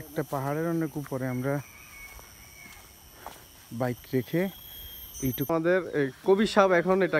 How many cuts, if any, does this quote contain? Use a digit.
1